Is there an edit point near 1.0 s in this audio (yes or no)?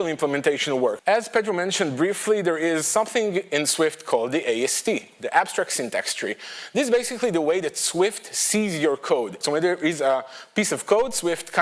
yes